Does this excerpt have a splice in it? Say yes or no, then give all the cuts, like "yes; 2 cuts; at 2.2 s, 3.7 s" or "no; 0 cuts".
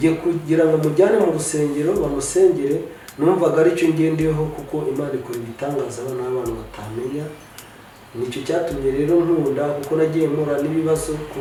no; 0 cuts